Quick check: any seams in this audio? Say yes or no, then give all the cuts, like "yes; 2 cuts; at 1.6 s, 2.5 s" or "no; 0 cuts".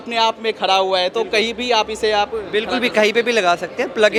no; 0 cuts